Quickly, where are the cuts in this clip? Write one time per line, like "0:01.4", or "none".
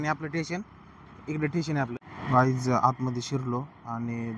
0:02.1